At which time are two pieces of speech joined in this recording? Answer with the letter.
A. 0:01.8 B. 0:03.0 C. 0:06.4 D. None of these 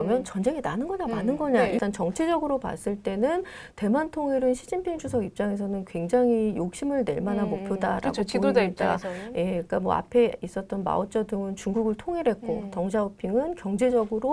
A